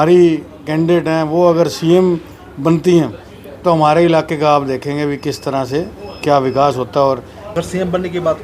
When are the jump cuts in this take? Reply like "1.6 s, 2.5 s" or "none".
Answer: 7.4 s